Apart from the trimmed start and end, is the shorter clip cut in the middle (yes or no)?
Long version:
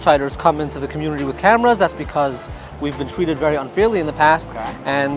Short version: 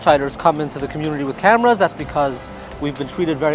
no